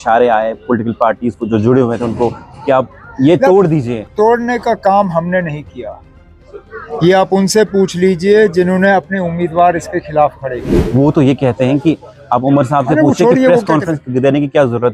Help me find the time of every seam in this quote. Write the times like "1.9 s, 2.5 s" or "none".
10.7 s